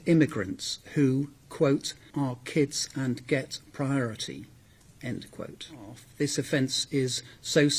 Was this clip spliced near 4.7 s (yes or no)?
no